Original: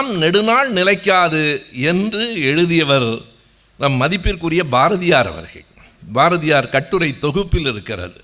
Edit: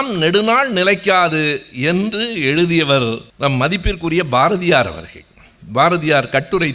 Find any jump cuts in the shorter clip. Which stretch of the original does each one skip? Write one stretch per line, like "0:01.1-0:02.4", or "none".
0:03.3-0:03.7